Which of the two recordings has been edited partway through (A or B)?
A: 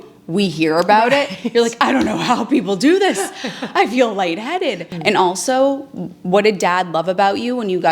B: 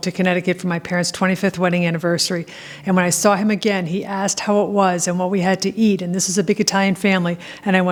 A